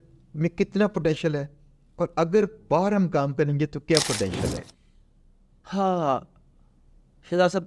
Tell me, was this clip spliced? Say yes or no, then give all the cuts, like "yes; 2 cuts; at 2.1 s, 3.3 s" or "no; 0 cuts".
no; 0 cuts